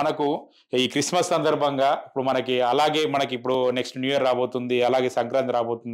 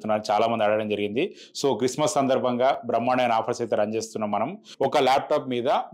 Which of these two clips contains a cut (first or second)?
second